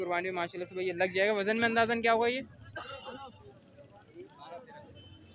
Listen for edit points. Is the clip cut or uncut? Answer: uncut